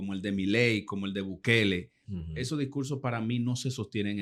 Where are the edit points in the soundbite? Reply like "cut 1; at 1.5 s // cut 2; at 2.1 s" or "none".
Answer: none